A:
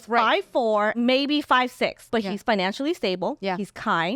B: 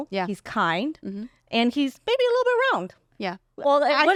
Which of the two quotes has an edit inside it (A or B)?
A